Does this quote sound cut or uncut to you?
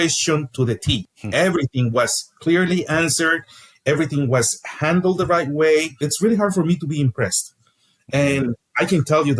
cut